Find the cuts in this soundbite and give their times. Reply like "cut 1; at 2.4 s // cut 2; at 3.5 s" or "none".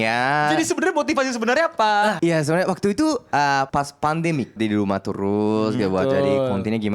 cut 1; at 2.2 s // cut 2; at 3.7 s // cut 3; at 4.5 s